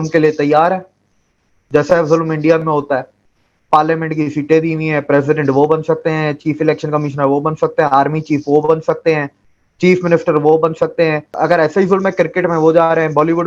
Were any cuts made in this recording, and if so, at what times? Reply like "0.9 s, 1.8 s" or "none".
11.4 s